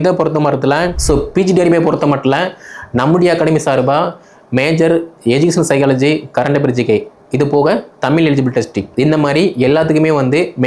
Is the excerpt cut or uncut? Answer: cut